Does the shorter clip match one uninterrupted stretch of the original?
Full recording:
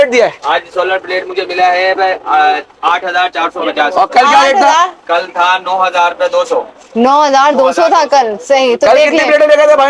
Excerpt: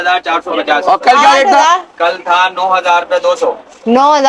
yes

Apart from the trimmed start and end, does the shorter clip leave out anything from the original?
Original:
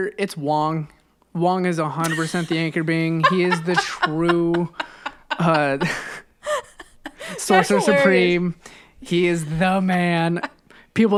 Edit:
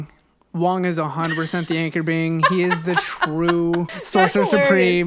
yes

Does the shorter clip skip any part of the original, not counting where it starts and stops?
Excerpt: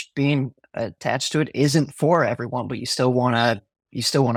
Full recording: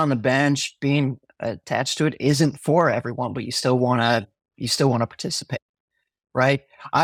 no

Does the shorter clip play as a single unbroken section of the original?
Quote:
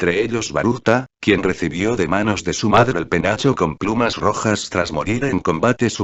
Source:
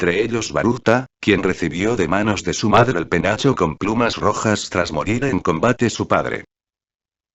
yes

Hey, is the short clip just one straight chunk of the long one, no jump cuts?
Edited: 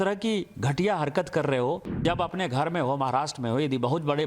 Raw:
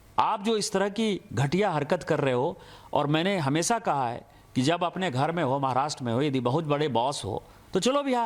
no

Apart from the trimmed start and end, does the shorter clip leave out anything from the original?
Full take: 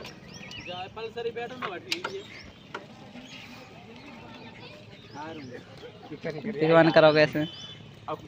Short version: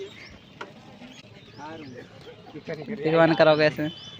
yes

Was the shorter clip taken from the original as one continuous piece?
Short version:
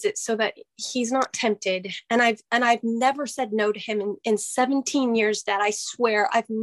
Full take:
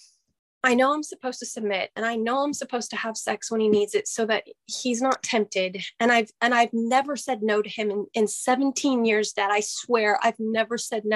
yes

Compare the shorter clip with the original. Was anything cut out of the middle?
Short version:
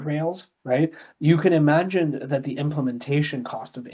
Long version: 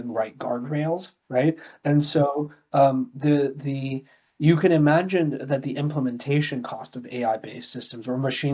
yes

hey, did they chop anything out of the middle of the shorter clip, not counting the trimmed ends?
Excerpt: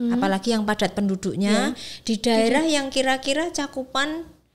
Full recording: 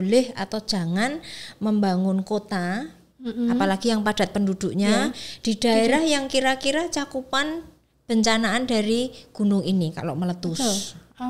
no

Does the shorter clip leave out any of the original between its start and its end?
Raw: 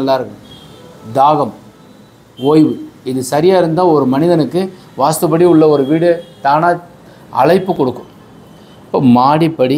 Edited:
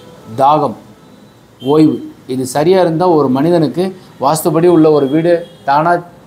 no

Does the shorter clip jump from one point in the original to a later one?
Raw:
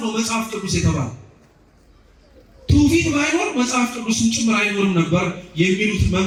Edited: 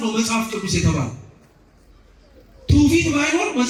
no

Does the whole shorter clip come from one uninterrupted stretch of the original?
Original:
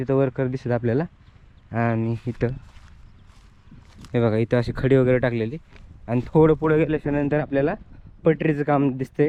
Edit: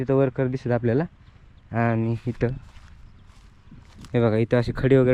yes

